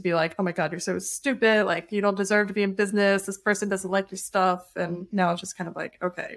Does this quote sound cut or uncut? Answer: uncut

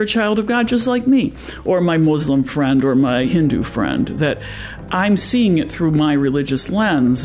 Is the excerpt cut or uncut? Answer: cut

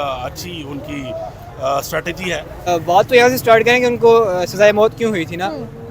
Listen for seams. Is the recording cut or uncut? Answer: cut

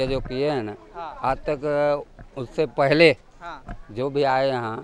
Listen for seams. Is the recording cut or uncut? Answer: uncut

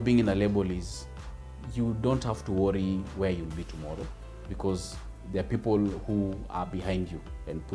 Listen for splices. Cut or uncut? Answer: uncut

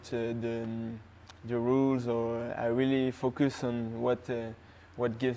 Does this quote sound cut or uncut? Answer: uncut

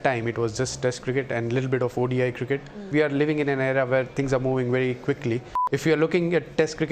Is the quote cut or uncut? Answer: cut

